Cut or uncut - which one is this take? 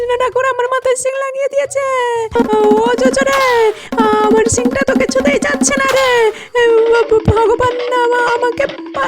cut